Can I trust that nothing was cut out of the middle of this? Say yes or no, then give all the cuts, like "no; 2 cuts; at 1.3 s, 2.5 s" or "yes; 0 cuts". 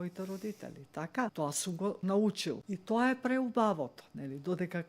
no; 2 cuts; at 1.8 s, 2.6 s